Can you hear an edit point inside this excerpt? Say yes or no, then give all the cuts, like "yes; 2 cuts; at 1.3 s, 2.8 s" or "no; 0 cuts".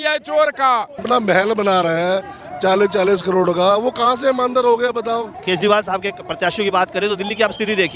yes; 2 cuts; at 1.0 s, 5.4 s